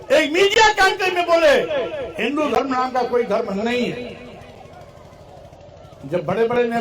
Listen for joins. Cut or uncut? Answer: uncut